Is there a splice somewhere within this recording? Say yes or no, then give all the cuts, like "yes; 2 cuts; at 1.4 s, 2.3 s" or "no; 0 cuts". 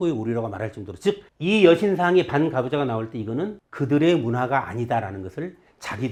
no; 0 cuts